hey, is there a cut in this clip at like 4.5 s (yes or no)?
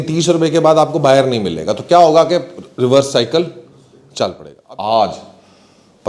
yes